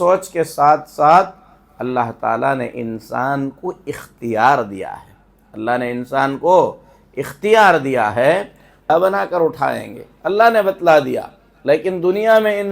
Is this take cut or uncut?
cut